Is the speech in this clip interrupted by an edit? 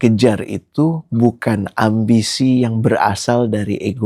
no; 0 cuts

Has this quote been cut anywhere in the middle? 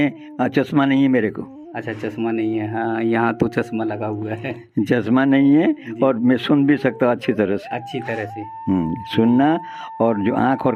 no; 0 cuts

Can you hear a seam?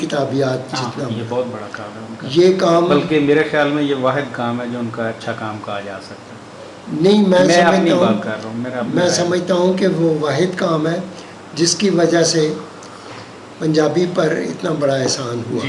no; 0 cuts

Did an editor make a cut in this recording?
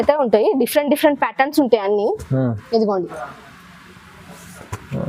no; 0 cuts

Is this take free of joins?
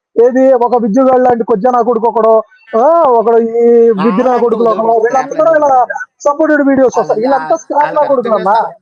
yes; 0 cuts

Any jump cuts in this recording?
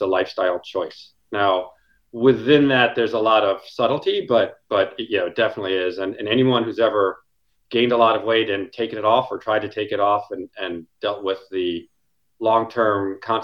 no; 0 cuts

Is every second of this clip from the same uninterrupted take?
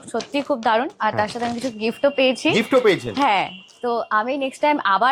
yes; 0 cuts

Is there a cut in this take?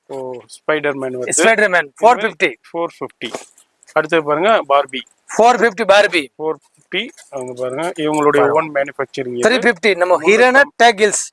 no; 0 cuts

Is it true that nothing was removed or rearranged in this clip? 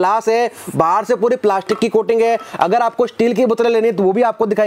yes; 0 cuts

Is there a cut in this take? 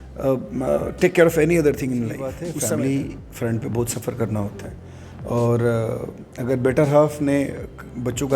yes; 1 cut; at 2.4 s

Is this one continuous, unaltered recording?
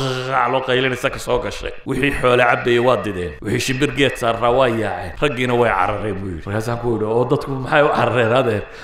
no; 4 cuts; at 1.7 s, 3.3 s, 5.0 s, 6.3 s

